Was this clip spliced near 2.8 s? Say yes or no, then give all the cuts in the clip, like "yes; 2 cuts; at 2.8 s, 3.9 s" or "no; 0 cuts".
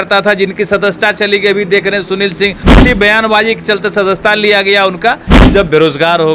yes; 2 cuts; at 2.8 s, 5.5 s